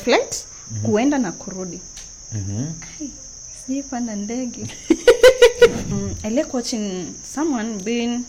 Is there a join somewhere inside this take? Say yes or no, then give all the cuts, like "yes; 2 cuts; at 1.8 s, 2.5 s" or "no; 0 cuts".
yes; 1 cut; at 5.8 s